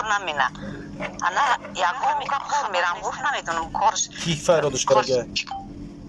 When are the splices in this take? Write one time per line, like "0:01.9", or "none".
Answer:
0:02.4